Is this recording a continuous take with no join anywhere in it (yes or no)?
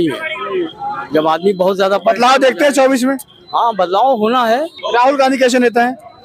yes